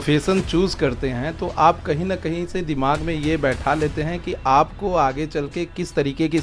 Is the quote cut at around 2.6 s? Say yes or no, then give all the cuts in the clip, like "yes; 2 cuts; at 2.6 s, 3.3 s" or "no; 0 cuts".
no; 0 cuts